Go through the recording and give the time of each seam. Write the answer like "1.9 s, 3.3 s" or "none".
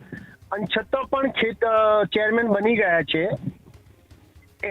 none